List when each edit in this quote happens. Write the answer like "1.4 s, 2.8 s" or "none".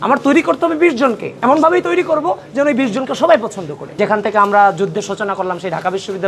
3.8 s